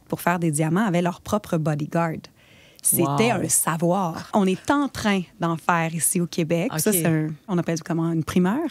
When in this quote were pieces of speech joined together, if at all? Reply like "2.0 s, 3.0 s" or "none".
4.3 s, 7.5 s